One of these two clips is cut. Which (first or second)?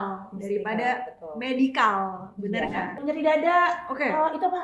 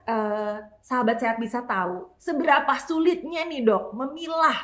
first